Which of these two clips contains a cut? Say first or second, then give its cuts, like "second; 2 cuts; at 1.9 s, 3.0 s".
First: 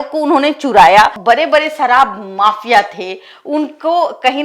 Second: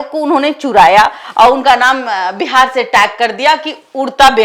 first; 1 cut; at 1.2 s